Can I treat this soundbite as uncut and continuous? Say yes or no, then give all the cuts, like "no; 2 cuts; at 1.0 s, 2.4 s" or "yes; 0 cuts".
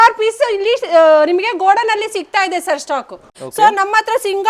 no; 1 cut; at 3.4 s